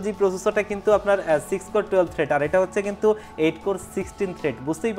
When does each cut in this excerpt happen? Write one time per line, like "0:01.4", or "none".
none